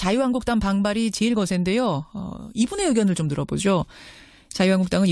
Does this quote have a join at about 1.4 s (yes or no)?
no